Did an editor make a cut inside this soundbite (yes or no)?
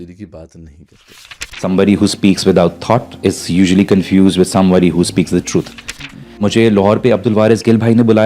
yes